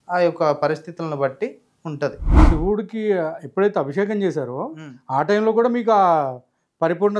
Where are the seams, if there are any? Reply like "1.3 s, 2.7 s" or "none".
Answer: 2.3 s